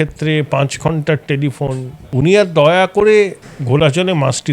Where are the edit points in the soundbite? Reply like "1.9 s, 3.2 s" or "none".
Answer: 2.0 s

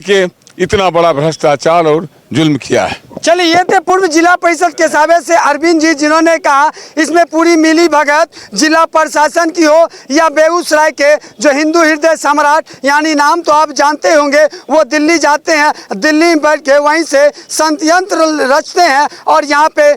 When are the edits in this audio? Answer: none

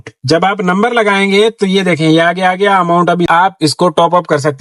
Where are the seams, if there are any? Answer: 3.3 s

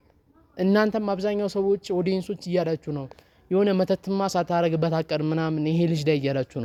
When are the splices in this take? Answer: none

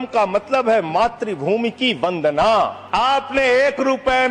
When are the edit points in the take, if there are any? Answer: 2.8 s

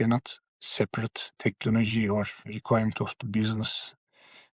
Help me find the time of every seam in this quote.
1.3 s, 2.5 s

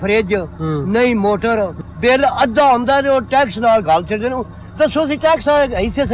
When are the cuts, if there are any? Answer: 1.8 s

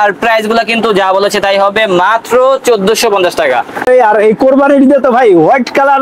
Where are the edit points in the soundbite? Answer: 3.9 s

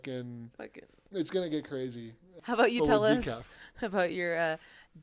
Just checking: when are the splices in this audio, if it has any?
2.3 s

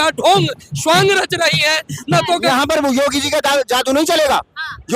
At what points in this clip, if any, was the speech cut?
2.4 s

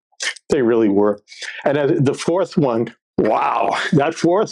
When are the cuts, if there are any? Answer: 3.0 s

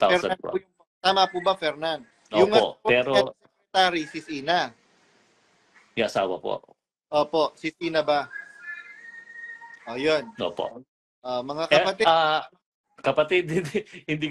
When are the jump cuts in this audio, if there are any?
2.1 s

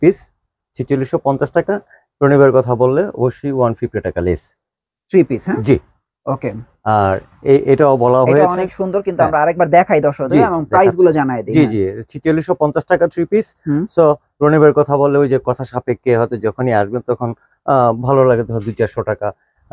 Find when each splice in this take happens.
none

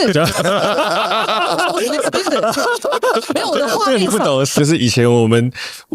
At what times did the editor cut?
4.6 s

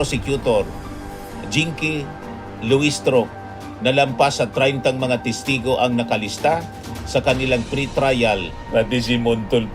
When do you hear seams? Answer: 8.6 s

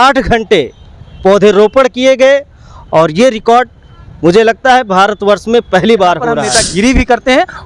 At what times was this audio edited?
6.4 s

